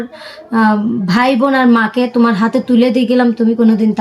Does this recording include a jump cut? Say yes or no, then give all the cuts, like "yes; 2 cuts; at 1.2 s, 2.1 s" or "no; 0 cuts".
no; 0 cuts